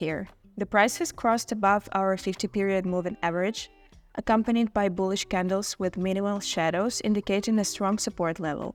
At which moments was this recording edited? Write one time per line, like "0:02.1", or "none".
none